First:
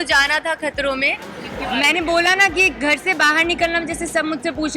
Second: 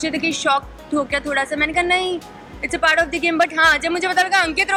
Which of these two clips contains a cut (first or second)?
first